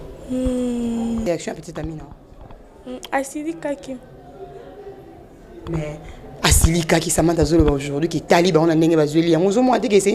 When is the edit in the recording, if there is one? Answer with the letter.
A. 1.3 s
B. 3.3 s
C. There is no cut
A